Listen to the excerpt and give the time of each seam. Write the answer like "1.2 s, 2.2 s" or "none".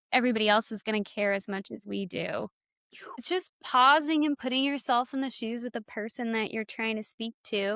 3.2 s